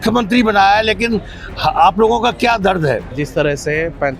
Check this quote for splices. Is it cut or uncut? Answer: cut